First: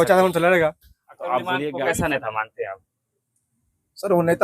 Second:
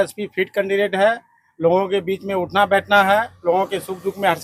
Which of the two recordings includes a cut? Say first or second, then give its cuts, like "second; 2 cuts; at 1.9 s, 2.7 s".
first; 1 cut; at 1.7 s